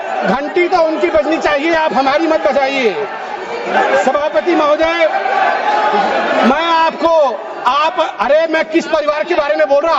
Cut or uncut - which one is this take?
uncut